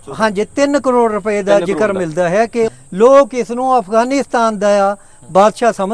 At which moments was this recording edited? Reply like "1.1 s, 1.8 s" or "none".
2.8 s